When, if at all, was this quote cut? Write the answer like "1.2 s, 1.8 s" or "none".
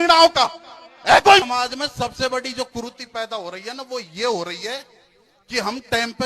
1.4 s